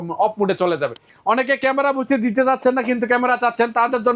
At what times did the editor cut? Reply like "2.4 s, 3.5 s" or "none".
1.1 s